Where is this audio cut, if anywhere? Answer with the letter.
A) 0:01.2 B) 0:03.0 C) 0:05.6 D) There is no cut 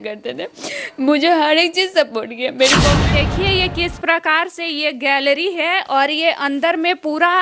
B